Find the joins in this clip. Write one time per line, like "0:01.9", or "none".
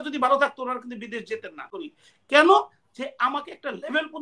0:01.6